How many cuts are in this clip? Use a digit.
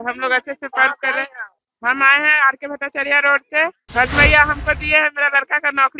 1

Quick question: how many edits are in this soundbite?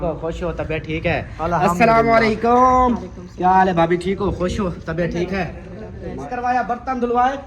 1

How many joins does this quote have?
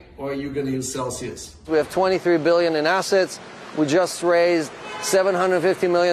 1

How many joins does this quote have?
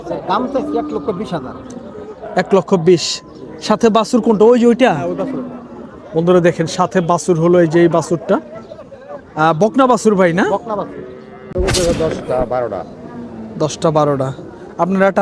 1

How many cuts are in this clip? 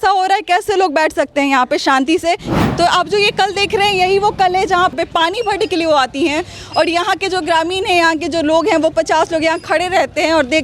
2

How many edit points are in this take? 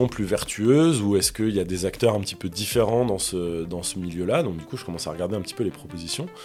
0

